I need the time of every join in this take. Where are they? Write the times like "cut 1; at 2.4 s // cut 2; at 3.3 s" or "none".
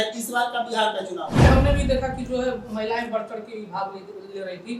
cut 1; at 1.5 s